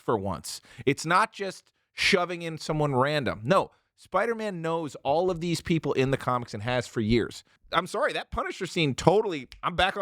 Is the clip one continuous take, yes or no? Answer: no